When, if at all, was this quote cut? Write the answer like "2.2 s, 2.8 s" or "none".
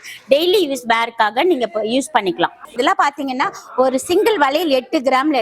2.8 s